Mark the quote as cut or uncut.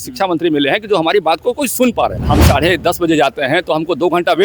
cut